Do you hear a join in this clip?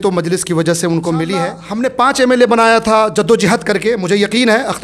yes; 1 cut; at 1.6 s

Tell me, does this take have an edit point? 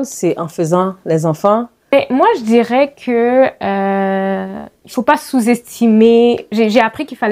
yes; 1 cut; at 1.9 s

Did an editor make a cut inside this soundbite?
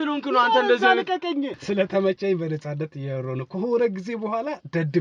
yes; 1 cut; at 1.6 s

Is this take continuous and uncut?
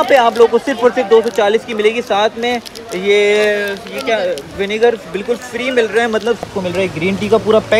no; 1 cut; at 6.5 s

